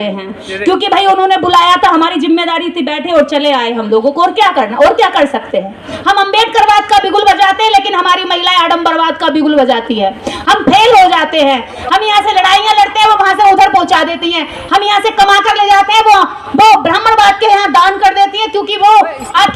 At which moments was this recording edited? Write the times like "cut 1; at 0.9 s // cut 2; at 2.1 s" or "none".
cut 1; at 5.9 s